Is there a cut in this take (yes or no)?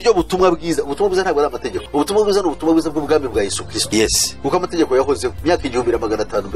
no